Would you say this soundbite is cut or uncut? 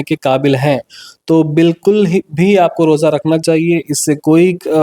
uncut